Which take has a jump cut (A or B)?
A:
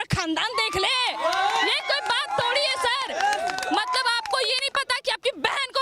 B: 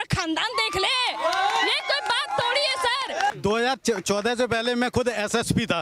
B